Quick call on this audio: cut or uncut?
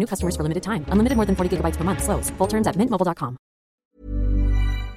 cut